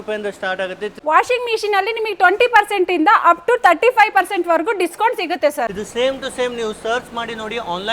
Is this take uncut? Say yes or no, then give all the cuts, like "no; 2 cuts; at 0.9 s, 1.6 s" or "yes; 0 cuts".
no; 2 cuts; at 1.0 s, 5.7 s